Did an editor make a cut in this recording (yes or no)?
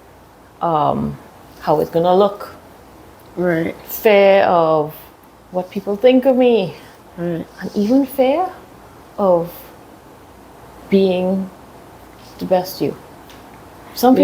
no